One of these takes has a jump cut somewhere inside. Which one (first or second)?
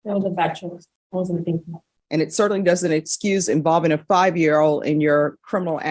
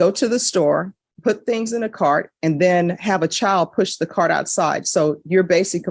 first